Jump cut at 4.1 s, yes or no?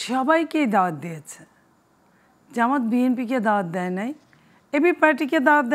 no